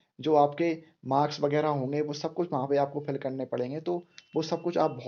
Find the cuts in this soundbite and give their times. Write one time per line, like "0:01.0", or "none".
none